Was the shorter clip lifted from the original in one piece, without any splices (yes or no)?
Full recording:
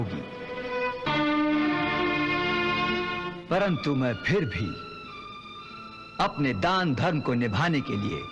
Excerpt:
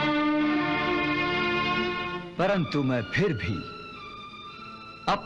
yes